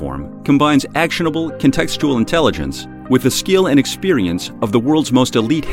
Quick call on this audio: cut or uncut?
uncut